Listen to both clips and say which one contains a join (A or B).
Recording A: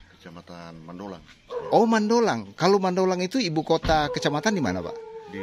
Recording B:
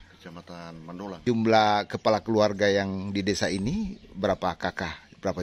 B